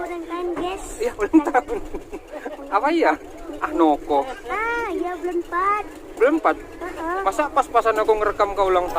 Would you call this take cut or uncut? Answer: uncut